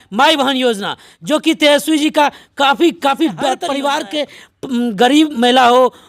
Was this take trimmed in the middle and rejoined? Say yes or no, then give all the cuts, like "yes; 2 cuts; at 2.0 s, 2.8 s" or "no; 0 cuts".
yes; 1 cut; at 3.6 s